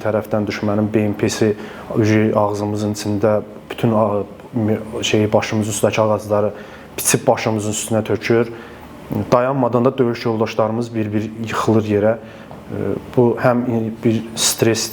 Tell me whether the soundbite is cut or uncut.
uncut